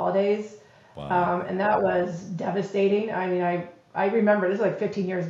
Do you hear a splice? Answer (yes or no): no